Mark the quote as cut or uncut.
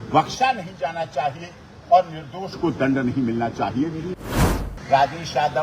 cut